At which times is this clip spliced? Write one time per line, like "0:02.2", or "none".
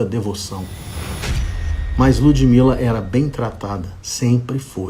0:01.3